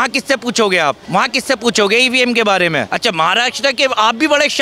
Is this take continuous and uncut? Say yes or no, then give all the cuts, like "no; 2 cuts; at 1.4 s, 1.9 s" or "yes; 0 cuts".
no; 2 cuts; at 1.0 s, 2.9 s